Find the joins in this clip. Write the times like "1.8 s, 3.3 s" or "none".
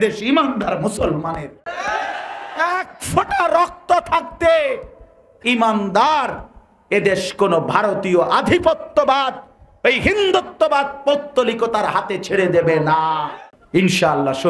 13.3 s